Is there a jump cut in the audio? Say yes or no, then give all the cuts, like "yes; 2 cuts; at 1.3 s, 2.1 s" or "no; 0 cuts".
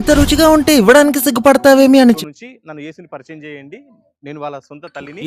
yes; 1 cut; at 2.2 s